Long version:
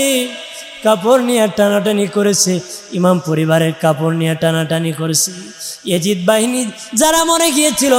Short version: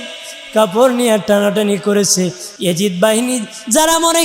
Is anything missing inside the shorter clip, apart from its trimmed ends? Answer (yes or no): yes